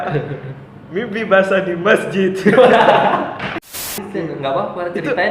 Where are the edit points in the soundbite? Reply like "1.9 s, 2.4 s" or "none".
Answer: 3.9 s